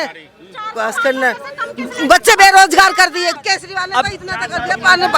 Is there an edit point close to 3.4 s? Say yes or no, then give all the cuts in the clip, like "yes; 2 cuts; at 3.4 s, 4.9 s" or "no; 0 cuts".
yes; 1 cut; at 3.4 s